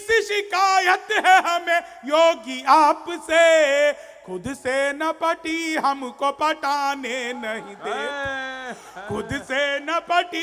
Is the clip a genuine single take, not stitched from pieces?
yes; 0 cuts

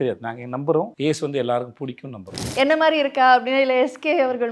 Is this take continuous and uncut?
no; 2 cuts; at 0.9 s, 2.4 s

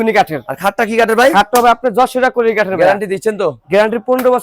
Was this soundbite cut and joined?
no; 0 cuts

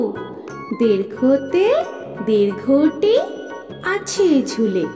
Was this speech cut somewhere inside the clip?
no; 0 cuts

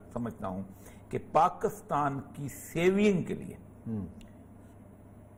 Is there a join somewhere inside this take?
no; 0 cuts

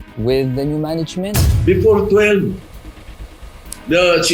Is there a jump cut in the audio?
yes; 1 cut; at 1.4 s

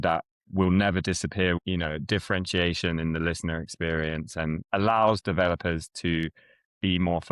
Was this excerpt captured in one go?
no; 2 cuts; at 1.6 s, 4.6 s

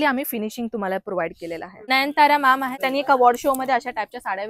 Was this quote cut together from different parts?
yes; 2 cuts; at 1.9 s, 2.8 s

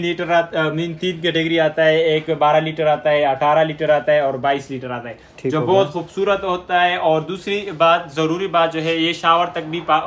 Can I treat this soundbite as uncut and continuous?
yes; 0 cuts

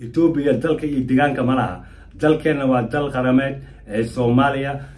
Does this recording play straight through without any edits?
yes; 0 cuts

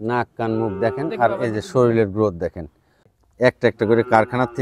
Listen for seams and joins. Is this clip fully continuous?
no; 1 cut; at 3.1 s

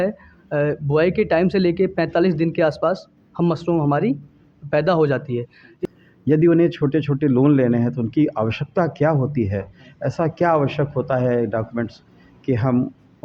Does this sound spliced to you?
yes; 1 cut; at 5.6 s

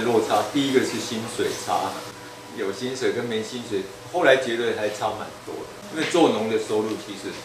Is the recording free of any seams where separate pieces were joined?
no; 1 cut; at 5.8 s

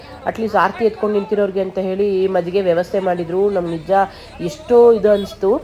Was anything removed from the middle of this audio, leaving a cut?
no; 0 cuts

